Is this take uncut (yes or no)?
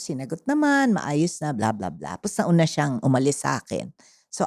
yes